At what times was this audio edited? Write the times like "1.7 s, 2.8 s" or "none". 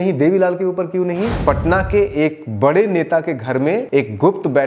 1.4 s, 3.8 s